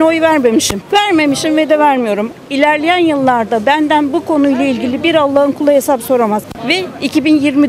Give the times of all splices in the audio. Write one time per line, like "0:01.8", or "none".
0:06.4